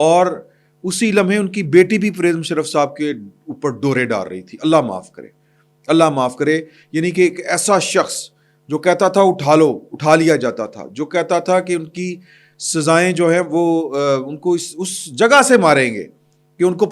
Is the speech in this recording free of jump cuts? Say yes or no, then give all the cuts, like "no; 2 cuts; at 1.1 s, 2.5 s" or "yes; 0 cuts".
yes; 0 cuts